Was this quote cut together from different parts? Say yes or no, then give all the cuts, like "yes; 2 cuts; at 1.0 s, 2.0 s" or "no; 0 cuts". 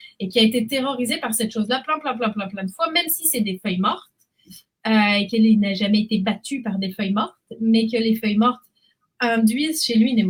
no; 0 cuts